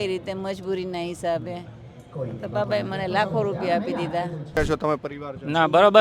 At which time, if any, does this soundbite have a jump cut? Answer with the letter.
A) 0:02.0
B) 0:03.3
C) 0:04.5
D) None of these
C